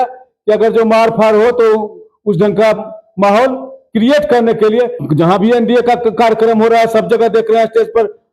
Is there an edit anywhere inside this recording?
yes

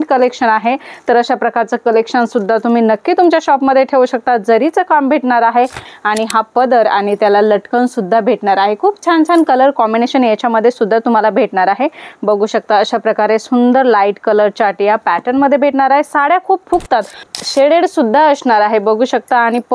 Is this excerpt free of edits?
no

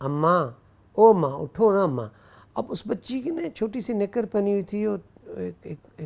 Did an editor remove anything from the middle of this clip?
no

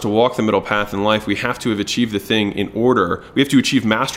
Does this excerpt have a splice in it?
no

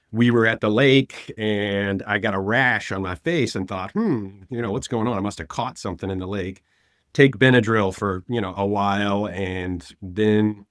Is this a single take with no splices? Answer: yes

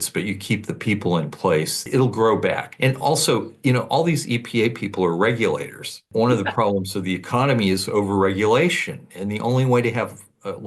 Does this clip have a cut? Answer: yes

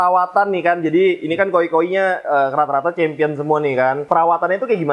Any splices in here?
yes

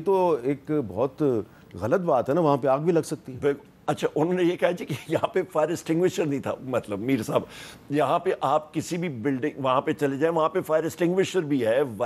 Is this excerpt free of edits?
yes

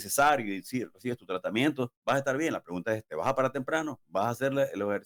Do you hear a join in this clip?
no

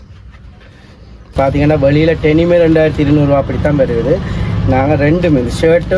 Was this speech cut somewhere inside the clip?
yes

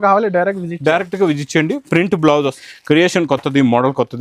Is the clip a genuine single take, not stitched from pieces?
no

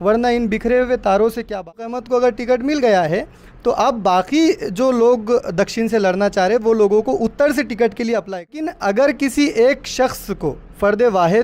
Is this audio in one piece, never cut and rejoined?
no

